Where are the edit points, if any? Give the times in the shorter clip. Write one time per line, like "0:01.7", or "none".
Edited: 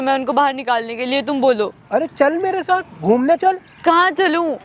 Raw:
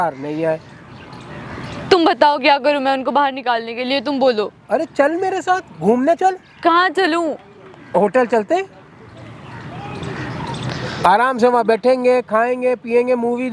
none